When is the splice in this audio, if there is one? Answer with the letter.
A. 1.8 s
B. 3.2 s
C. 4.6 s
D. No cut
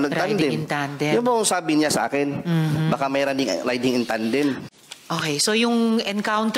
C